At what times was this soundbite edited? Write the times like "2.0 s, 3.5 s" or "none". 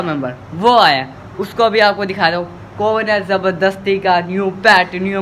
none